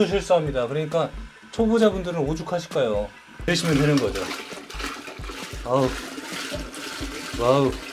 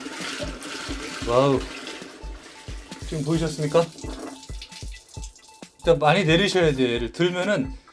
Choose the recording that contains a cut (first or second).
first